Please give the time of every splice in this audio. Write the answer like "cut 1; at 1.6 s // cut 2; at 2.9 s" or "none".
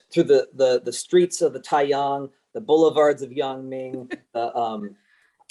none